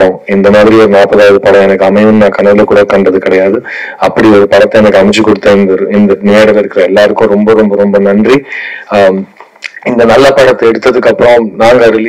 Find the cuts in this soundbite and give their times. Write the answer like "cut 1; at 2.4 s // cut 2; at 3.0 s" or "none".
none